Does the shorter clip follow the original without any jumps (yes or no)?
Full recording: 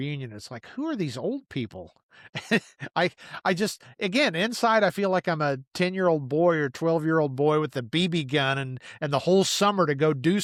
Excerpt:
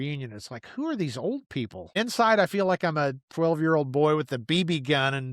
no